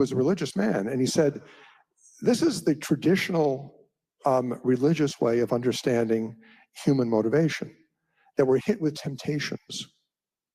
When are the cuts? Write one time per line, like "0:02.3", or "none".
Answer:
none